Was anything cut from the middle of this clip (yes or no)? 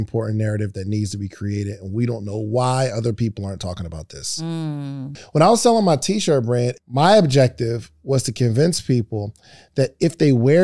yes